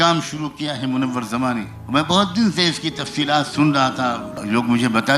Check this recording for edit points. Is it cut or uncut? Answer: cut